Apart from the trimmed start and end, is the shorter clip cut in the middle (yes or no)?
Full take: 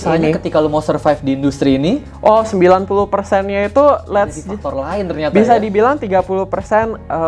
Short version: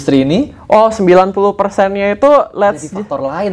no